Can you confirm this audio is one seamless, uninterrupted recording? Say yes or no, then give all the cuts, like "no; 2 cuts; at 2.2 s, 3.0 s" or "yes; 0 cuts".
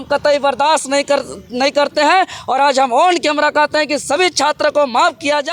yes; 0 cuts